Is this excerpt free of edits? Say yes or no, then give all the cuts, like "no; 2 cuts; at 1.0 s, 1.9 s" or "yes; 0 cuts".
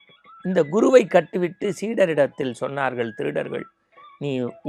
yes; 0 cuts